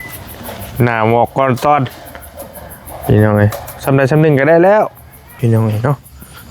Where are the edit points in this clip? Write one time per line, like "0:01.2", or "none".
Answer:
0:05.4